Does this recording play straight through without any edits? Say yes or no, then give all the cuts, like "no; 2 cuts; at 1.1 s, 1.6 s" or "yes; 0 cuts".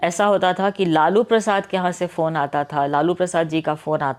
yes; 0 cuts